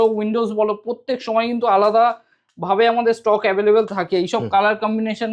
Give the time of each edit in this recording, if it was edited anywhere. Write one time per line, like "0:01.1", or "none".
none